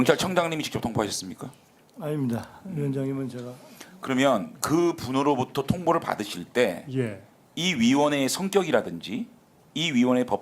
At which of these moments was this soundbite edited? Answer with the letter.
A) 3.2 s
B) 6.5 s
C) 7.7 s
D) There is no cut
C